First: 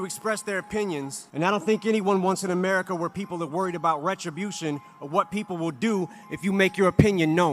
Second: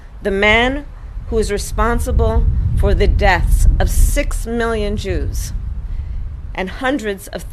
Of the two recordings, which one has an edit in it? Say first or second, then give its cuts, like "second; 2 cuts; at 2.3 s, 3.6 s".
first; 1 cut; at 1.2 s